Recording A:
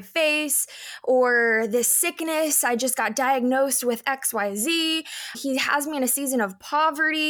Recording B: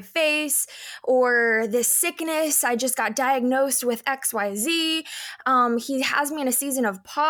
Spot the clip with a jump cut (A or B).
A